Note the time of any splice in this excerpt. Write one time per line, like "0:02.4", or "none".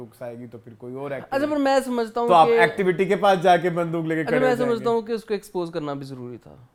none